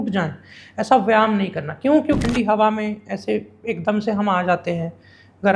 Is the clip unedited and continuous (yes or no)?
no